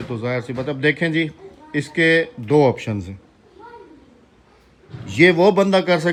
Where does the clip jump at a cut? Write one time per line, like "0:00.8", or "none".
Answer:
none